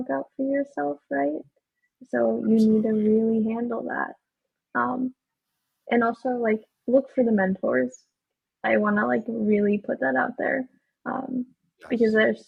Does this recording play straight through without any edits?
yes; 0 cuts

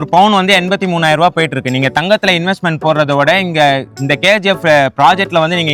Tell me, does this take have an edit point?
no; 0 cuts

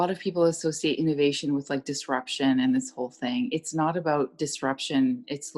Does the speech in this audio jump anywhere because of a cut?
no; 0 cuts

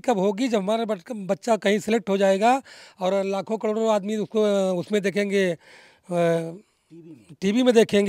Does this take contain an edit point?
no; 0 cuts

